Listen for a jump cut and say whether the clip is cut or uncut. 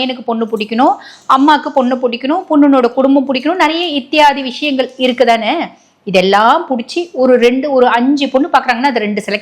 uncut